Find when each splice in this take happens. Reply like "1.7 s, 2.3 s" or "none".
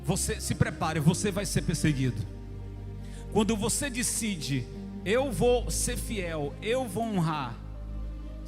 none